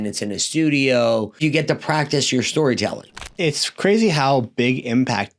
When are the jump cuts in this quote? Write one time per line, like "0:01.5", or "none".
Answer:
0:01.4
0:03.3